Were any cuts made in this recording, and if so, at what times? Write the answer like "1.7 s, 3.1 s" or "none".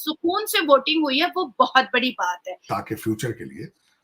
2.7 s